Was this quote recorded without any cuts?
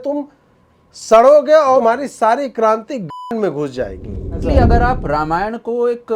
no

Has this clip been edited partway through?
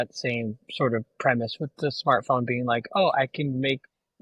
no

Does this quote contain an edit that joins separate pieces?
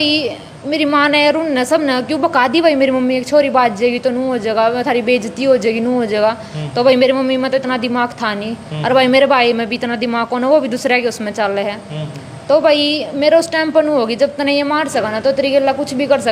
no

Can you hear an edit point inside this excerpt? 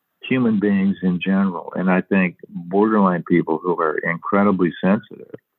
no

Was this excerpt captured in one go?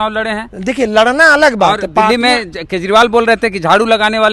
yes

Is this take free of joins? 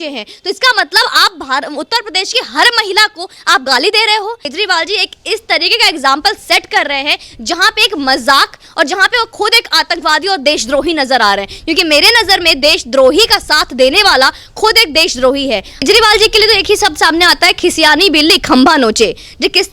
no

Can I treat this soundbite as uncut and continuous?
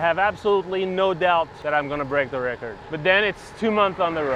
no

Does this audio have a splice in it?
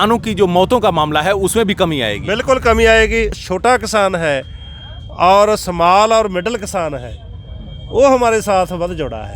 yes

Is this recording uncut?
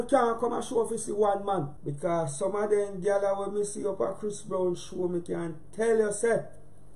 no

